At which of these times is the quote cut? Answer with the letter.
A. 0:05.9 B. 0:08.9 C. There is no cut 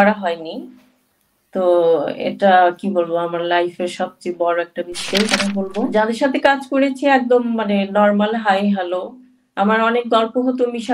A